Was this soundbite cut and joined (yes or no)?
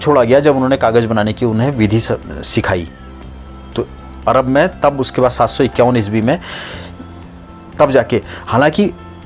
no